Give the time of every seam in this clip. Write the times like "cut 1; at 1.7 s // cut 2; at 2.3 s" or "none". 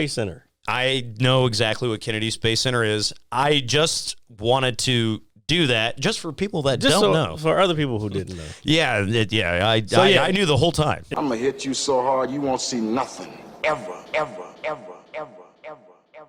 cut 1; at 11.1 s